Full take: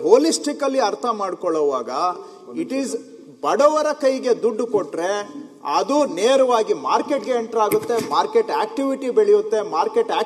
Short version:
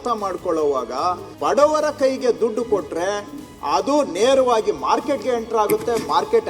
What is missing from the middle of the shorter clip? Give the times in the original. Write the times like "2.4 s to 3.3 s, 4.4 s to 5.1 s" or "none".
2.3 s to 3.3 s